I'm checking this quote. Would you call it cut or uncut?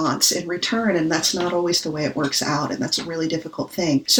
uncut